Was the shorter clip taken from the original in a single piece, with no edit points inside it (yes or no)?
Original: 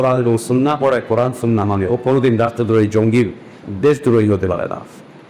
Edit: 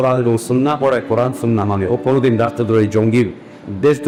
yes